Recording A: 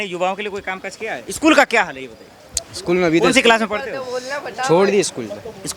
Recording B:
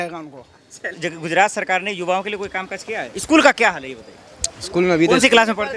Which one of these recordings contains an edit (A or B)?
B